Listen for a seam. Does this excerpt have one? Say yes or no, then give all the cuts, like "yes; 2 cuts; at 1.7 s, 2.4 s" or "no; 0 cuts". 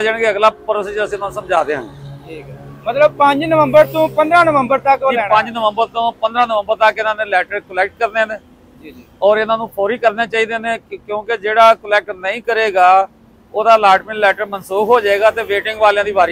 no; 0 cuts